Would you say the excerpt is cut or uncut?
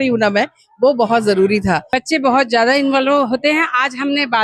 cut